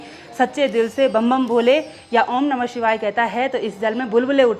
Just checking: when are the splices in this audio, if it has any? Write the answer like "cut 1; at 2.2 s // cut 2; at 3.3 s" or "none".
none

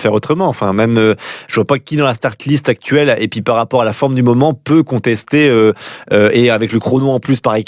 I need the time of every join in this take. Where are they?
none

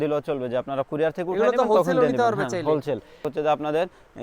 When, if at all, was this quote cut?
cut 1; at 3.3 s

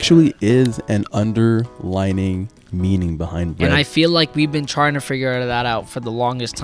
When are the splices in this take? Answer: none

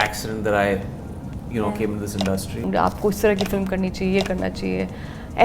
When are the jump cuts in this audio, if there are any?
cut 1; at 2.6 s

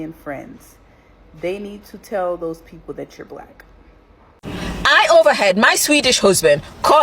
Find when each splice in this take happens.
cut 1; at 4.3 s

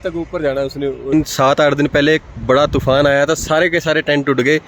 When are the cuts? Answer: cut 1; at 1.1 s

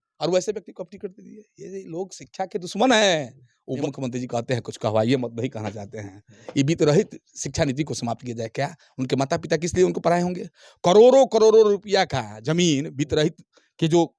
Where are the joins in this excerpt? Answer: cut 1; at 3.9 s

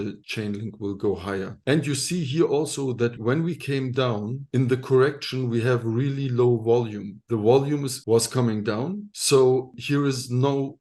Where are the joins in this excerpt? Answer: cut 1; at 3.2 s

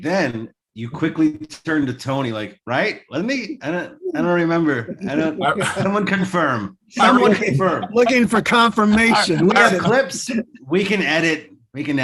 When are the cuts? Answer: cut 1; at 10.2 s

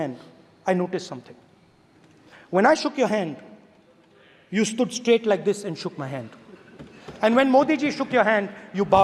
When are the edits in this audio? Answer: none

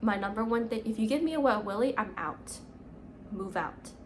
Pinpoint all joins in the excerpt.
none

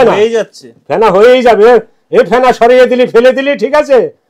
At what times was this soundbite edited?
none

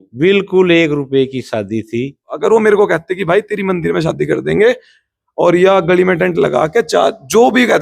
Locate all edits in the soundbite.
cut 1; at 2.2 s

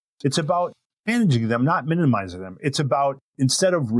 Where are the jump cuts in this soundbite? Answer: cut 1; at 1.1 s

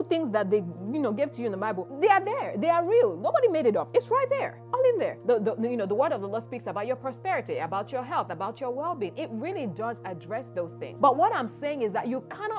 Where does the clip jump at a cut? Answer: cut 1; at 1.9 s // cut 2; at 5.2 s // cut 3; at 10.8 s

